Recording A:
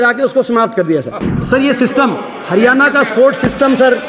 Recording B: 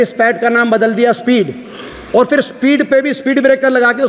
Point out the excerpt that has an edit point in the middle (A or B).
A